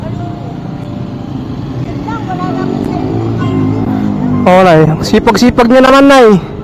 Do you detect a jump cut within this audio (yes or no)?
no